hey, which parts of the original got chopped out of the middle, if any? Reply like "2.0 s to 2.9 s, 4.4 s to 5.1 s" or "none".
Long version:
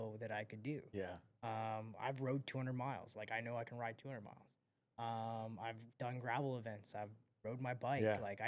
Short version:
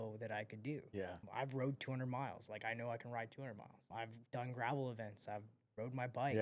1.2 s to 1.9 s, 4.5 s to 5.5 s